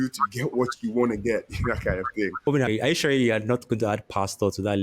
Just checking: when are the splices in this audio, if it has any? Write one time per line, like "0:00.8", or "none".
0:02.7